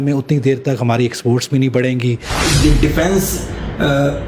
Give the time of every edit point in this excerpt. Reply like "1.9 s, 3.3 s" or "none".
2.3 s

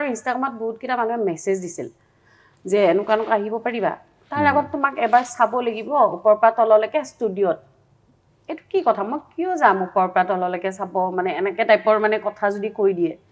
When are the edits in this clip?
none

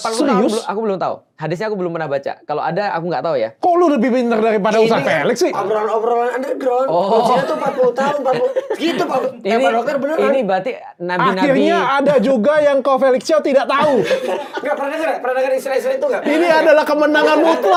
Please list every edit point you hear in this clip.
none

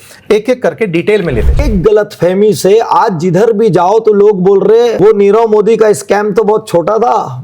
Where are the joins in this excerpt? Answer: 1.7 s, 4.9 s

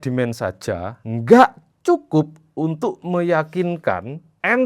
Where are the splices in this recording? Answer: 1.0 s

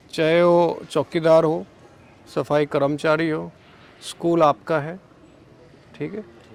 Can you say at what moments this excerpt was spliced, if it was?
none

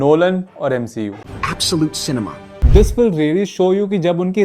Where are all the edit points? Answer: 2.6 s

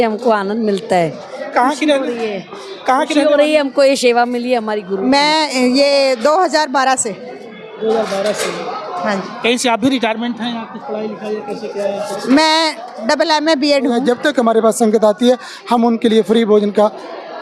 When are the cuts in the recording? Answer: 4.9 s, 14.0 s

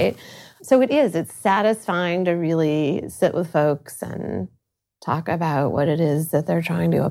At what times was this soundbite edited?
none

